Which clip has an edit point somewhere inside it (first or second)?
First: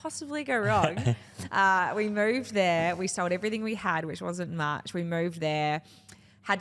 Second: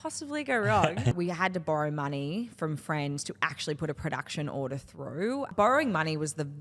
second